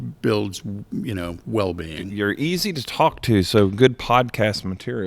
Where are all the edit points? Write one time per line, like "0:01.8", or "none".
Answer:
0:02.0